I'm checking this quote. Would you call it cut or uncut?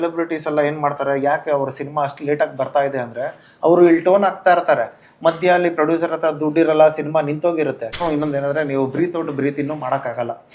cut